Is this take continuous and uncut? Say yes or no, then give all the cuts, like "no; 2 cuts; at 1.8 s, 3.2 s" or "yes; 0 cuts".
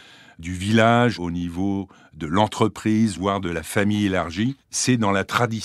no; 1 cut; at 1.2 s